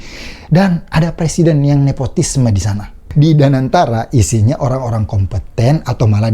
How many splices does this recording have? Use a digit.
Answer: 1